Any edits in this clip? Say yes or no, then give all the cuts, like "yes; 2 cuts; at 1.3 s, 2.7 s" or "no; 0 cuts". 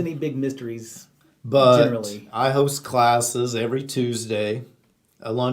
yes; 1 cut; at 2.2 s